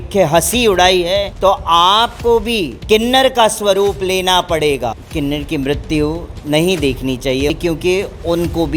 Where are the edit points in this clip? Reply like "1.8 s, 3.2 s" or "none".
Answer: 1.3 s, 2.7 s, 5.0 s, 7.5 s